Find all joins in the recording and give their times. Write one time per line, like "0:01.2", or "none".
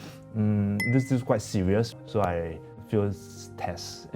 0:01.9